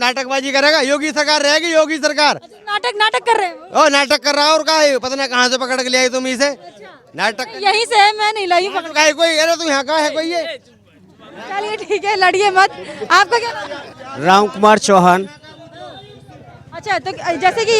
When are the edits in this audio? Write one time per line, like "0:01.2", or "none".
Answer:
none

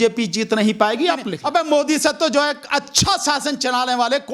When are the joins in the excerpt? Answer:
0:01.4

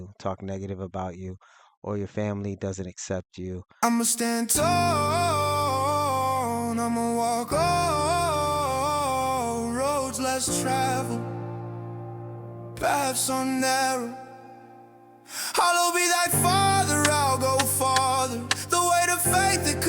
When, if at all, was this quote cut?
0:03.7

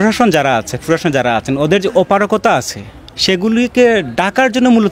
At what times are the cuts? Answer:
none

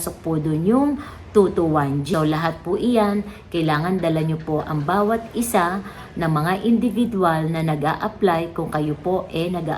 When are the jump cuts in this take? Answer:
0:02.1

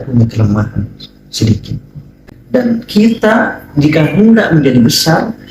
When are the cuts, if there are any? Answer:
0:02.3

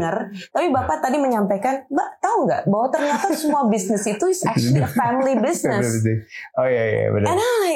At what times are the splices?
none

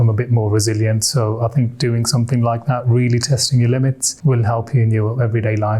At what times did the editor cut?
0:04.1

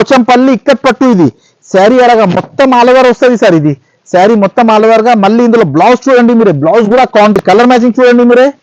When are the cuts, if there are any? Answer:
0:07.4

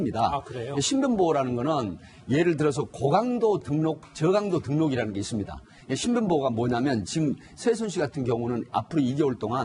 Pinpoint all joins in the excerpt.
none

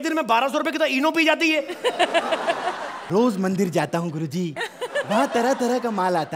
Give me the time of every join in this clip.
0:02.9

